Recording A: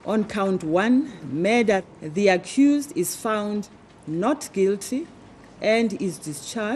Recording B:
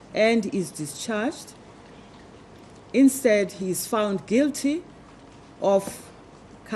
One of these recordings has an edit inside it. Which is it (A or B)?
A